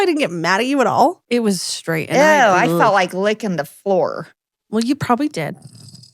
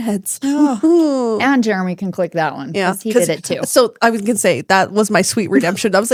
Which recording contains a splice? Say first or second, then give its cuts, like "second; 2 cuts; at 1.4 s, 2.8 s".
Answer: first; 1 cut; at 1.2 s